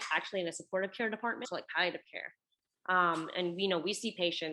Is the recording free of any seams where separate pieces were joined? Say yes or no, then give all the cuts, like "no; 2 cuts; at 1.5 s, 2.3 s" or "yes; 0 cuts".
no; 1 cut; at 1.4 s